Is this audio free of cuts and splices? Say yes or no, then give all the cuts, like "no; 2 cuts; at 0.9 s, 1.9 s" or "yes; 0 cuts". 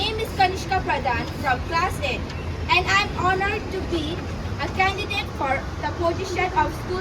yes; 0 cuts